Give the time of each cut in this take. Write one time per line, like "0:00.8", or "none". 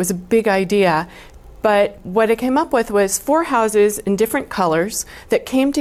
none